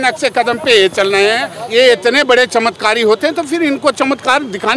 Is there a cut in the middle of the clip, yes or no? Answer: yes